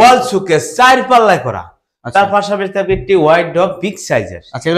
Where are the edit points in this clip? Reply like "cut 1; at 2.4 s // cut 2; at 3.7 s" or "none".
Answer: none